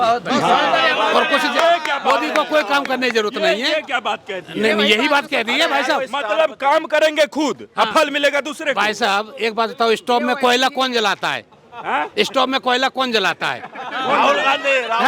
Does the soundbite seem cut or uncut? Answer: uncut